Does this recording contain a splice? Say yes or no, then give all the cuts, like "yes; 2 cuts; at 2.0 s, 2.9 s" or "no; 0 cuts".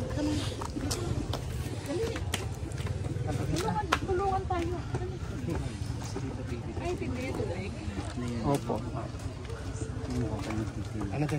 no; 0 cuts